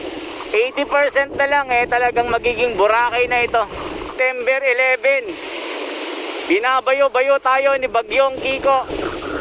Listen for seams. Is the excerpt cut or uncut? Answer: cut